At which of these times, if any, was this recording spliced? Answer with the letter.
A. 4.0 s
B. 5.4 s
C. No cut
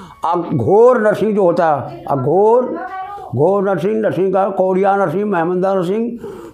C